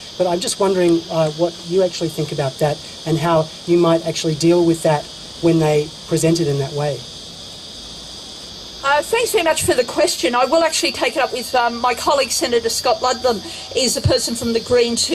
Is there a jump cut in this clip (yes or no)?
yes